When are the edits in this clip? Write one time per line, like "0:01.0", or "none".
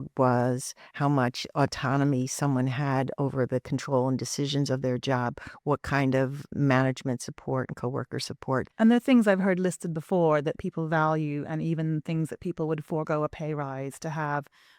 0:08.7